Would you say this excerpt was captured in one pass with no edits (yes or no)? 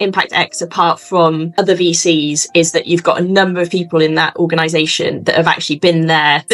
yes